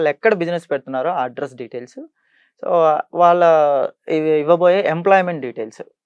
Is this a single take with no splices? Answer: yes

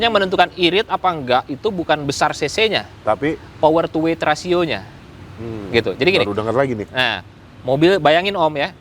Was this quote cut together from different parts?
no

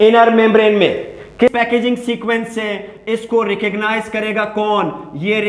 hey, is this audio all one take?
no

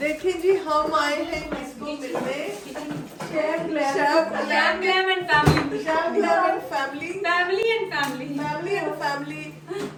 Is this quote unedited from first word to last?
yes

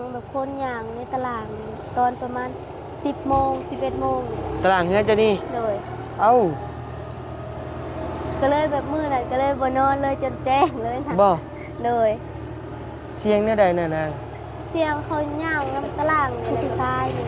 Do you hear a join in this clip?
no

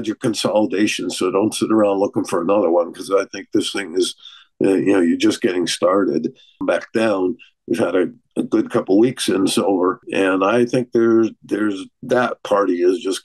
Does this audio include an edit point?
yes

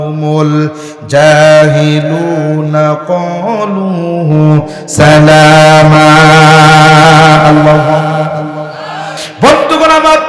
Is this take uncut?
no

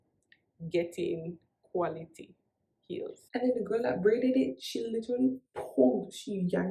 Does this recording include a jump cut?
yes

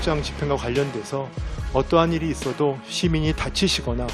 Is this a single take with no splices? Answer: yes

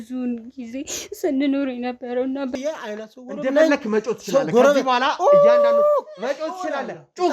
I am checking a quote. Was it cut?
yes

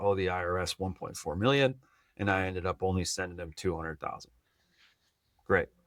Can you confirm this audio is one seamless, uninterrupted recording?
yes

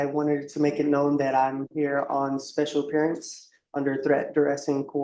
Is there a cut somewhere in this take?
no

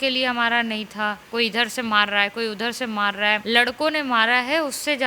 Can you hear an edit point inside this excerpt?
yes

